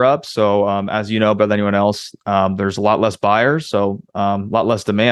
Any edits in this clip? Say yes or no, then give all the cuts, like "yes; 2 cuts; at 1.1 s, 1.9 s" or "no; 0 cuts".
no; 0 cuts